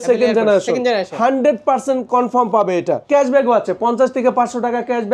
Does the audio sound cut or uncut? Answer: cut